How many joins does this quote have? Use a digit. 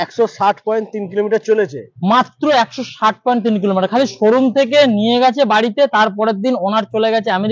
0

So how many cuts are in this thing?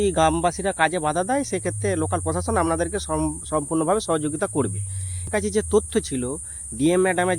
1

